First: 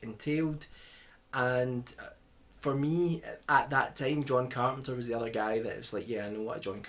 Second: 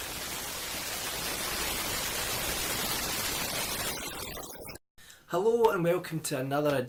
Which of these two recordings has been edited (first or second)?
first